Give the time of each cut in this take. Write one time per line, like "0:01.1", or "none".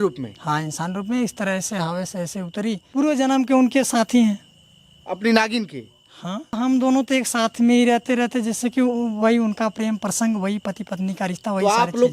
0:02.8
0:06.6